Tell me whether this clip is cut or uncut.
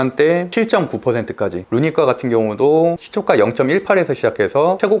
cut